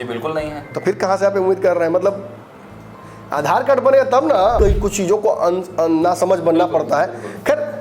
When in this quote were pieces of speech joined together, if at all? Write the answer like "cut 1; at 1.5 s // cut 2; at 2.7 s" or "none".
cut 1; at 4.6 s